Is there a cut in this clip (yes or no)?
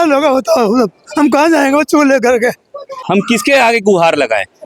yes